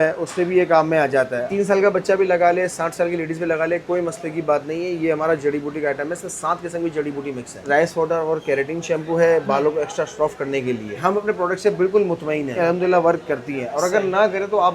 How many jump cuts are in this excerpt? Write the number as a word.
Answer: four